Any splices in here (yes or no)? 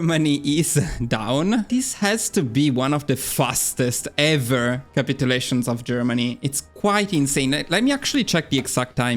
yes